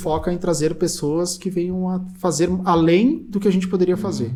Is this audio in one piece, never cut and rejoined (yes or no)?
yes